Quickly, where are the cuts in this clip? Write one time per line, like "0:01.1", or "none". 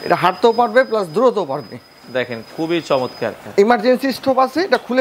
0:03.4